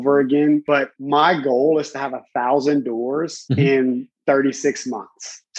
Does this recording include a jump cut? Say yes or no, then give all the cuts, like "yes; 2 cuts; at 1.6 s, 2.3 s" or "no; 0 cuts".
yes; 2 cuts; at 0.9 s, 3.4 s